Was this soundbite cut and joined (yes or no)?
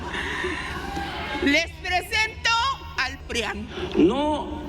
yes